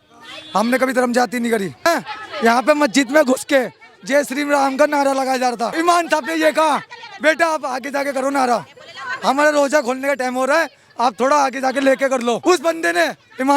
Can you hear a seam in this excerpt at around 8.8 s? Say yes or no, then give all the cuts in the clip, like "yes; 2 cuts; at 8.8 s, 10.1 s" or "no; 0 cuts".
no; 3 cuts; at 2.3 s, 5.7 s, 12.4 s